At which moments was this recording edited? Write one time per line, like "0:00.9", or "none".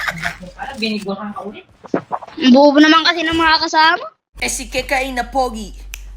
0:04.4